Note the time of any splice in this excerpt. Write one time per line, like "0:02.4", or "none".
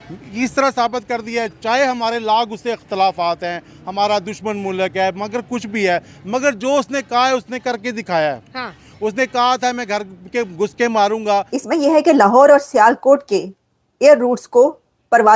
0:11.5

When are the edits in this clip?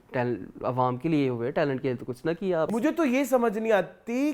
0:02.7

